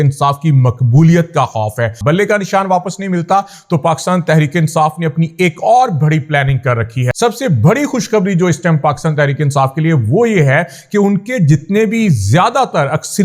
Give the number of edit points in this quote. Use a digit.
2